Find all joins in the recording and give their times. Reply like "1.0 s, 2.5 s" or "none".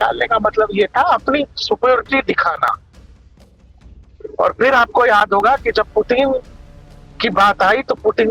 none